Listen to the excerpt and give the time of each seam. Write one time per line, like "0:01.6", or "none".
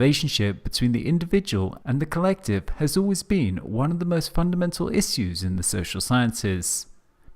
0:01.4